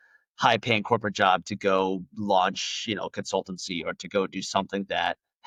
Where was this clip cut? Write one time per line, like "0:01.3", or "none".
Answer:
none